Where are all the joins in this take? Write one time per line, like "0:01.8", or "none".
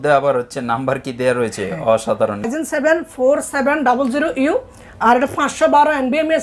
0:02.5